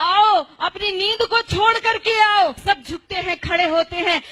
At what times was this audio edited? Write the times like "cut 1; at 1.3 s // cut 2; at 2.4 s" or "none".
cut 1; at 2.6 s